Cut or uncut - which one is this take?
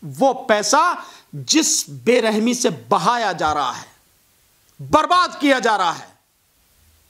uncut